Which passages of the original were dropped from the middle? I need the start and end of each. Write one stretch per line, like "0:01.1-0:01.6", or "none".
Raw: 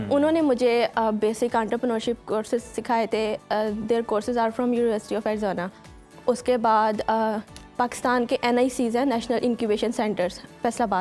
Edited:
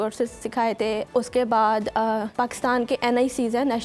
0:03.4-0:06.2
0:07.4-0:07.7